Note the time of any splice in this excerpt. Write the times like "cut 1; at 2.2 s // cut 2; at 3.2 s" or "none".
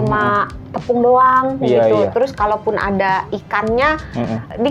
none